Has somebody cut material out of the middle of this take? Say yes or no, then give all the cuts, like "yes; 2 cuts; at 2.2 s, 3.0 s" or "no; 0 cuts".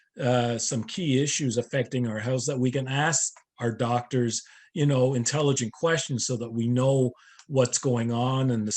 no; 0 cuts